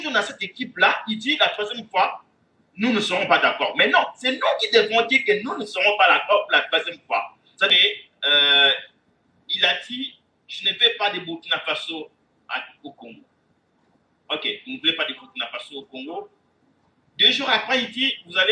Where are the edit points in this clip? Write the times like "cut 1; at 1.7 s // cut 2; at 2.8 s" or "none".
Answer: cut 1; at 7.8 s